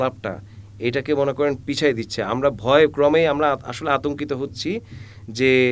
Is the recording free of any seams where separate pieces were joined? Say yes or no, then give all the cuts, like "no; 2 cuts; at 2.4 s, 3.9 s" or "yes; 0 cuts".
yes; 0 cuts